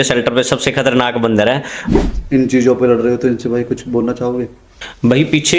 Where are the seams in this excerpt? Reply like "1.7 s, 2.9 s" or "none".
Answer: 2.0 s